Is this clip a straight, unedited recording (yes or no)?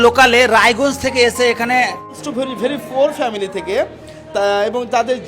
no